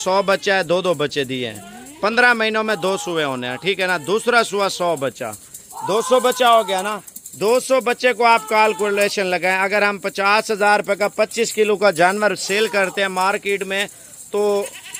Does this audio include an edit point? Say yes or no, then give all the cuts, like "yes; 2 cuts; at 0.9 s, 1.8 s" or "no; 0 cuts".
no; 0 cuts